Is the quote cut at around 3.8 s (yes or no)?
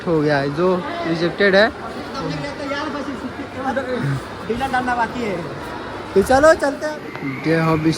no